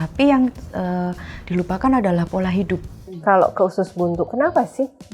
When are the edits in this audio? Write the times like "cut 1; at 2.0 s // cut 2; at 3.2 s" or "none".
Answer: cut 1; at 3.2 s

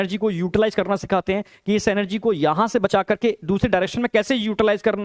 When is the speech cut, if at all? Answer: none

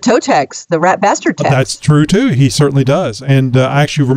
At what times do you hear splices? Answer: none

